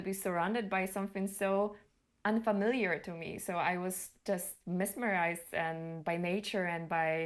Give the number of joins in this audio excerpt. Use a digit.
0